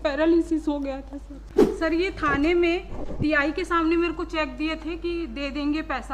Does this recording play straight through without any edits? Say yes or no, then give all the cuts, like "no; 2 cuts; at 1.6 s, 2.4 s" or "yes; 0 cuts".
no; 1 cut; at 1.4 s